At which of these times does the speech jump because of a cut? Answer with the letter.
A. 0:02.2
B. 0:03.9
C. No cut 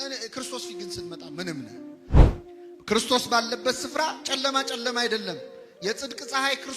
A